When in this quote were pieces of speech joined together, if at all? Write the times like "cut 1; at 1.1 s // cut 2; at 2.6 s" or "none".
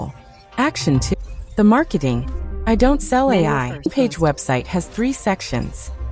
cut 1; at 1.1 s // cut 2; at 3.9 s